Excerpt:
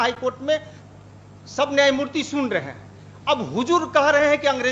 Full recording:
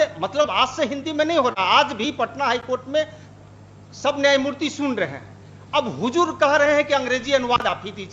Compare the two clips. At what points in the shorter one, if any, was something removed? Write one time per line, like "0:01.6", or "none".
none